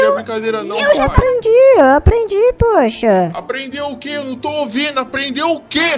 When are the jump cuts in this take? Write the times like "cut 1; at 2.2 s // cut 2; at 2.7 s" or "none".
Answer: cut 1; at 1.0 s